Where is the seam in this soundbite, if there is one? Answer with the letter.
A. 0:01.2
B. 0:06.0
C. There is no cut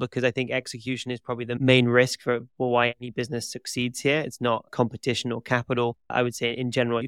B